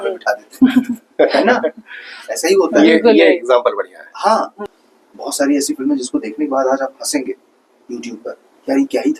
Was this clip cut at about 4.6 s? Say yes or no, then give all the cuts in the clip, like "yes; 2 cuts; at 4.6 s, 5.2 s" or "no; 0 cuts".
yes; 1 cut; at 4.6 s